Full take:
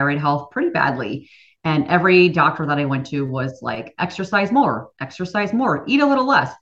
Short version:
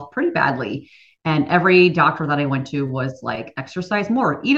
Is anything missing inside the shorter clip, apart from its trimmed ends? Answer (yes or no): yes